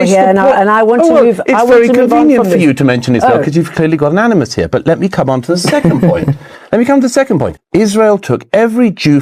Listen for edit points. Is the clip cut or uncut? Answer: cut